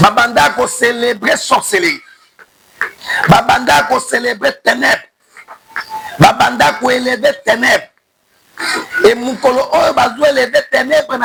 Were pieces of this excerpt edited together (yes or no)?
no